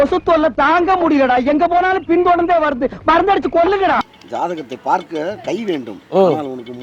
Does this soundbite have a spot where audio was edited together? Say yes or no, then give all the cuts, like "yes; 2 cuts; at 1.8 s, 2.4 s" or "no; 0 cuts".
yes; 1 cut; at 4.2 s